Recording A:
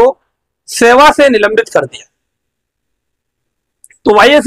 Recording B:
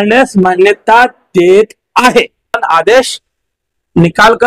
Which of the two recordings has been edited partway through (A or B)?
B